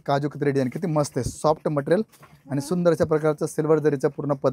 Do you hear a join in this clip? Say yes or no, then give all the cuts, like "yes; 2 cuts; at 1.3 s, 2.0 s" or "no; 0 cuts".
no; 0 cuts